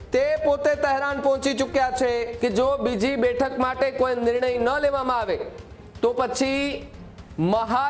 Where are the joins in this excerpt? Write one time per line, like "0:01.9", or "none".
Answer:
0:02.3